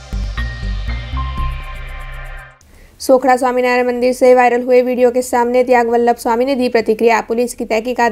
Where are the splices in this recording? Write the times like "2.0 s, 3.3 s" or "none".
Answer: 2.4 s